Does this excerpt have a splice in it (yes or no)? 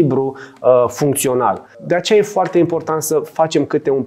yes